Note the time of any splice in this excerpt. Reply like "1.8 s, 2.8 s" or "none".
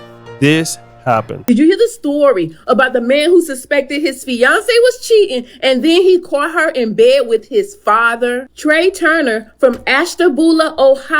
1.8 s